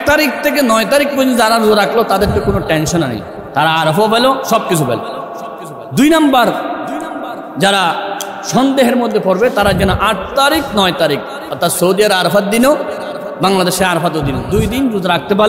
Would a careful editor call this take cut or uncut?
uncut